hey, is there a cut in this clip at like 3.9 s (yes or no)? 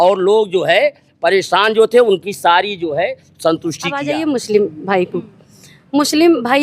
yes